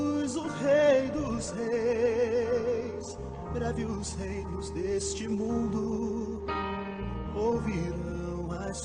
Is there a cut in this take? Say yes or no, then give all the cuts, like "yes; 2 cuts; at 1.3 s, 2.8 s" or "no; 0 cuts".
no; 0 cuts